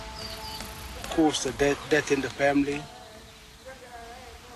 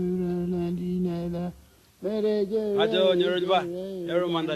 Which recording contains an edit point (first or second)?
second